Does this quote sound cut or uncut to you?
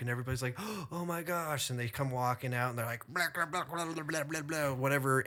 uncut